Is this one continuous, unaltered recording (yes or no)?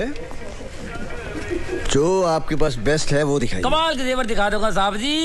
yes